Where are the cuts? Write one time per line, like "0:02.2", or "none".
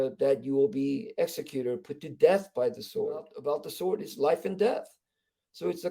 0:03.3